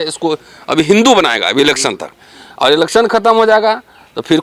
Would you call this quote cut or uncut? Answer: uncut